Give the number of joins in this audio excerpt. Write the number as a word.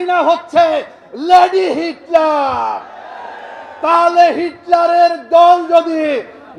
zero